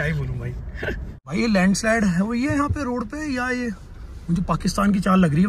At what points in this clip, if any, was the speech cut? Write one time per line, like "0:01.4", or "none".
0:01.2